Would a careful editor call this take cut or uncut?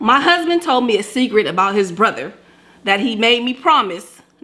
uncut